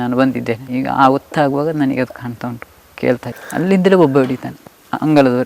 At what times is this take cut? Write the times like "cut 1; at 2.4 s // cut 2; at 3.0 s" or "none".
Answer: cut 1; at 3.3 s